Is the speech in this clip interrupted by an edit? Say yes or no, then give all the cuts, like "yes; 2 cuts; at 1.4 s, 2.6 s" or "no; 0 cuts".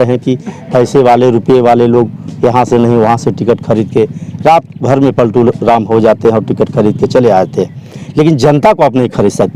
no; 0 cuts